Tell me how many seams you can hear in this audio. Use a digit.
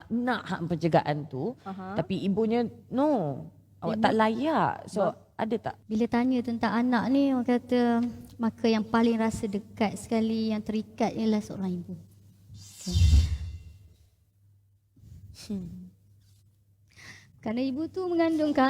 1